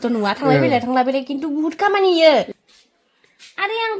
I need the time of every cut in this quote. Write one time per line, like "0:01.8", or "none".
0:02.5